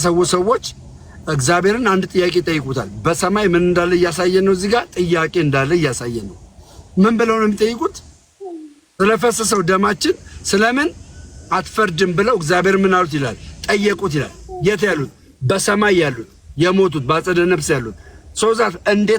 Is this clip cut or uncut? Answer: uncut